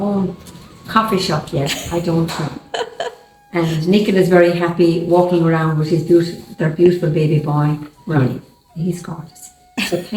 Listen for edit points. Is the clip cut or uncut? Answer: uncut